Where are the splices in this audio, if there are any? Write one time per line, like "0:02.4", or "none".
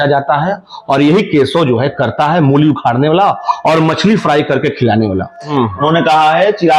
0:05.5